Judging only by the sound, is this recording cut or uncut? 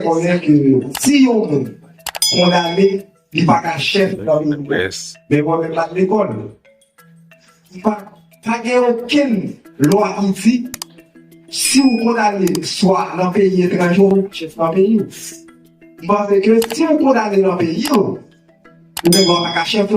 cut